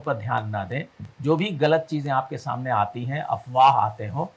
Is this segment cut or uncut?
uncut